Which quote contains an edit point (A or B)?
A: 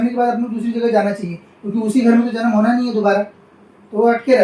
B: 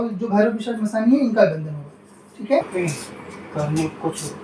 B